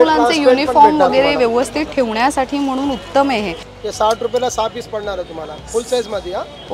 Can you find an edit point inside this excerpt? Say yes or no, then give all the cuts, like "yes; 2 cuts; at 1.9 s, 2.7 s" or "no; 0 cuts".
yes; 1 cut; at 3.6 s